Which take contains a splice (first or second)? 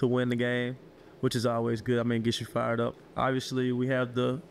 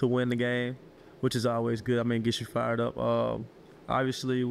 first